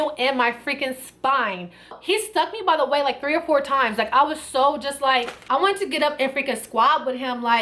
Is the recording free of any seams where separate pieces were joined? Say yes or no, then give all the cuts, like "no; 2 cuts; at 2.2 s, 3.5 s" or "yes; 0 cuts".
no; 1 cut; at 2.0 s